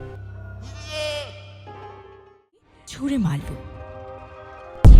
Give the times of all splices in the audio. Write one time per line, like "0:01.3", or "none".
0:02.8